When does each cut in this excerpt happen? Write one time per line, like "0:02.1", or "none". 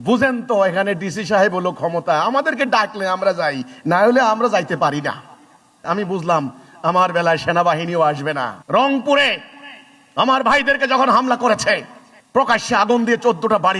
0:08.6